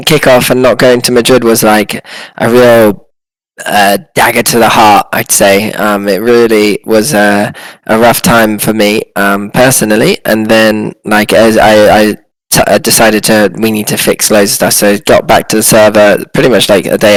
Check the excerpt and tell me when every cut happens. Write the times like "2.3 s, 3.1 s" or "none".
none